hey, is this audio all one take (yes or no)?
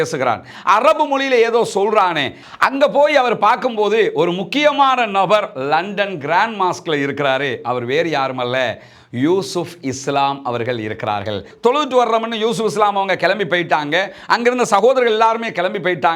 no